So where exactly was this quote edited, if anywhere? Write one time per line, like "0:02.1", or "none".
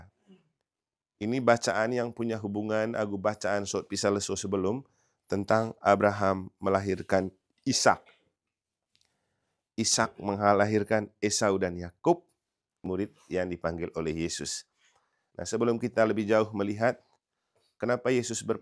0:12.8